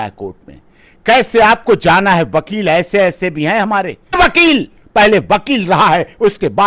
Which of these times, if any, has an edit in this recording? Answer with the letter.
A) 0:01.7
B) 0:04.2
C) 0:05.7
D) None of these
B